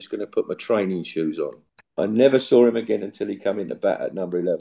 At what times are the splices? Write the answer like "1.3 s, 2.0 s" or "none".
1.6 s